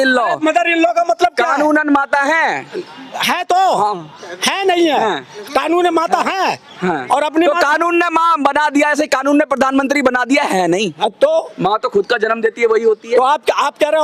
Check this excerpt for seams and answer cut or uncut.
uncut